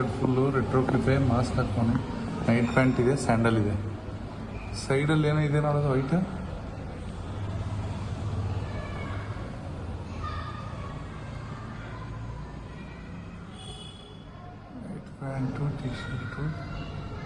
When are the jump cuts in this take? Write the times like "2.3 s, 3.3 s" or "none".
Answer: none